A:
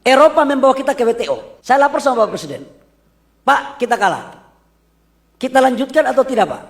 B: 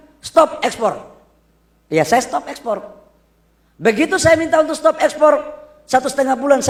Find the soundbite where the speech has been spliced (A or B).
A